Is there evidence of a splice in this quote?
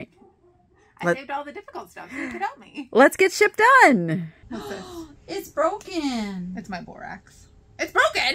yes; 1 cut; at 4.5 s

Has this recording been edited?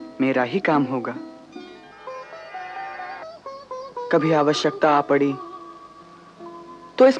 no; 0 cuts

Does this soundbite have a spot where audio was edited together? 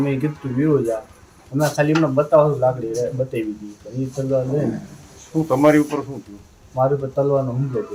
no; 0 cuts

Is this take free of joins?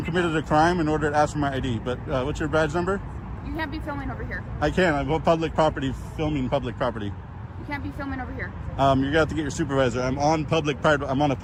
yes; 0 cuts

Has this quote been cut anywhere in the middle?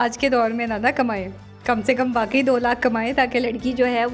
no; 0 cuts

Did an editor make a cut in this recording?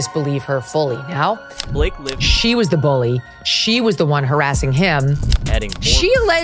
yes; 2 cuts; at 1.7 s, 5.4 s

